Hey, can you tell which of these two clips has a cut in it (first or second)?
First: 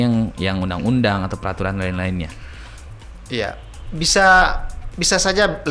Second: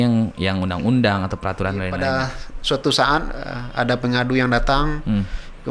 second